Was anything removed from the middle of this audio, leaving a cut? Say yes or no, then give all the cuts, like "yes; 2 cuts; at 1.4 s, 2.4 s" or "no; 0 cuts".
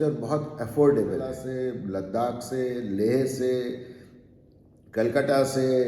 yes; 1 cut; at 1.4 s